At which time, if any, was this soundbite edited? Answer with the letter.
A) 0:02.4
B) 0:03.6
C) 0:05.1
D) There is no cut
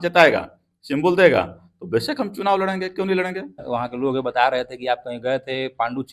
B